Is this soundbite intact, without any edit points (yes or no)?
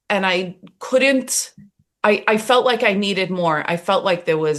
yes